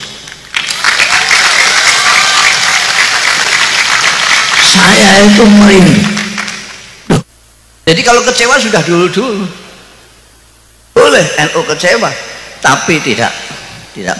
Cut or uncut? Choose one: cut